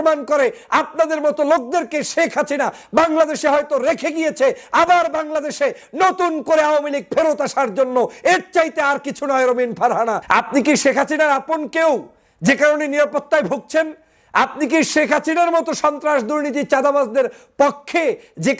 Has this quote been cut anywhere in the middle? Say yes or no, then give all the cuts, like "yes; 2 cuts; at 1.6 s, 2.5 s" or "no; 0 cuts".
yes; 1 cut; at 10.2 s